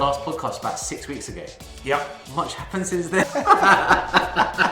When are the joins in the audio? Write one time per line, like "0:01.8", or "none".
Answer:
0:03.2